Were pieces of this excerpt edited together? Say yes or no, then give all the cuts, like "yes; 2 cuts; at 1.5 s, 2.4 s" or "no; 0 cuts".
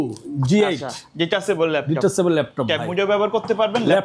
no; 0 cuts